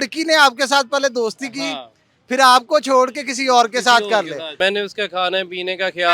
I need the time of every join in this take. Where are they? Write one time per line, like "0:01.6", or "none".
0:04.4